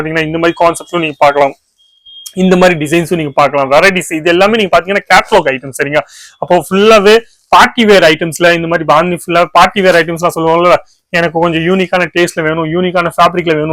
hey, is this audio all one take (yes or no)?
yes